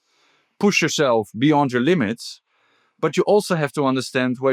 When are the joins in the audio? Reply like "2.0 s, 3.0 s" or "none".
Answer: none

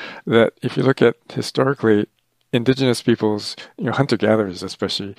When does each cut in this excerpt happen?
2.1 s

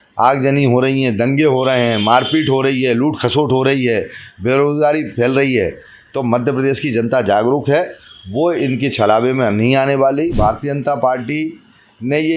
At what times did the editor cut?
10.3 s

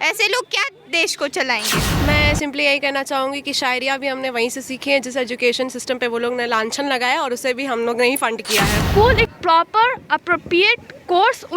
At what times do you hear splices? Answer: 1.8 s, 8.8 s

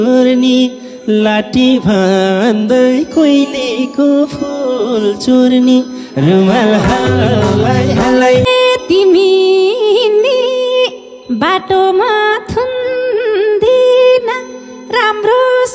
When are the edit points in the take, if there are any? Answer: 8.5 s

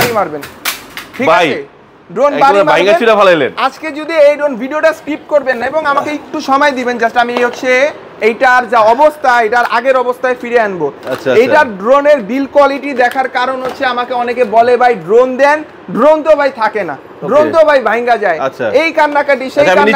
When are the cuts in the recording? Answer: none

